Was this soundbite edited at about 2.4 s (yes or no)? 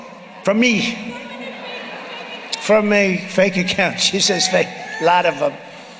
no